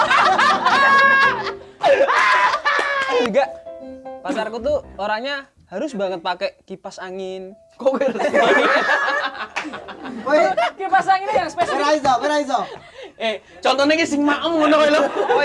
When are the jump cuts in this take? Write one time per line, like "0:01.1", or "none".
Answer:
0:03.3

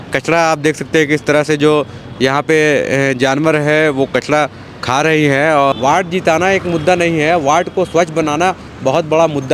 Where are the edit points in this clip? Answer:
0:05.7

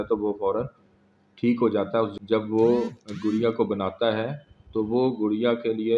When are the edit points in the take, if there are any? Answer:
0:02.1

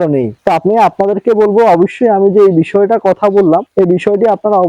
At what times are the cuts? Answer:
none

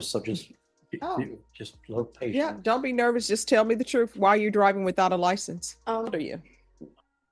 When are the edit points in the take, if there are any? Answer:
0:06.1

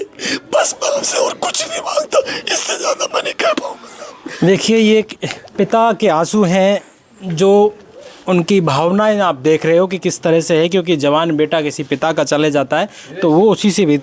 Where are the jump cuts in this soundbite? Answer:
none

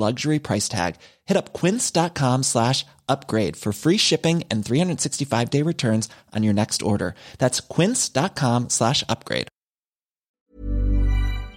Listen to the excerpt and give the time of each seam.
0:10.3

